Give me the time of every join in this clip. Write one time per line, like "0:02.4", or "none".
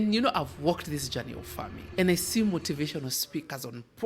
0:01.8